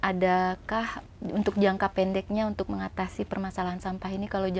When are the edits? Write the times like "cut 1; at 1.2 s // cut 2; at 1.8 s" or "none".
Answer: cut 1; at 1.0 s